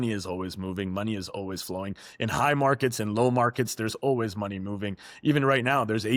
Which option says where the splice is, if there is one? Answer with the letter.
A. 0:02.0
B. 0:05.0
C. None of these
C